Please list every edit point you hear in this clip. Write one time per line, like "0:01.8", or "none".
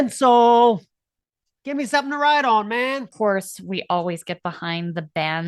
0:03.1